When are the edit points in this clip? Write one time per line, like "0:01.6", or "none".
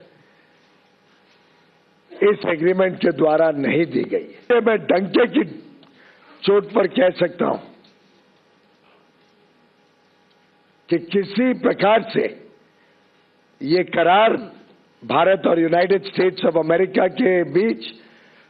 0:04.5